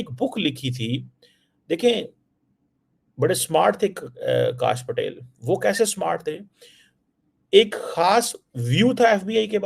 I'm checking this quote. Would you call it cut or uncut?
uncut